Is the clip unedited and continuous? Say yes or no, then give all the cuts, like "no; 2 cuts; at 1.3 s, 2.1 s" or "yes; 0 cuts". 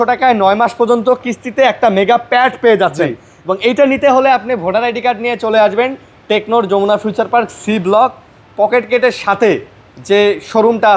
yes; 0 cuts